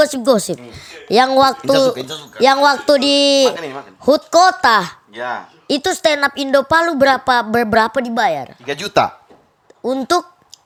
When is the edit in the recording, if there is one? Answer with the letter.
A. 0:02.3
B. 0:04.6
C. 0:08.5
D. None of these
D